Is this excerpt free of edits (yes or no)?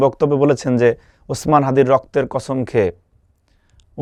yes